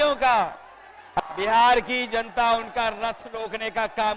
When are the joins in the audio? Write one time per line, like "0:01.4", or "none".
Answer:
0:01.2